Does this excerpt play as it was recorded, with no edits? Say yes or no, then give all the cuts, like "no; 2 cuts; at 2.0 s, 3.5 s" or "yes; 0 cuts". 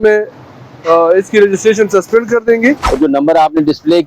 no; 1 cut; at 2.9 s